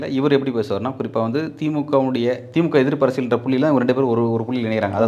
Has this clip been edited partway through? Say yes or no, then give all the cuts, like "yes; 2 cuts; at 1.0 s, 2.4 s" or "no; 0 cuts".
no; 0 cuts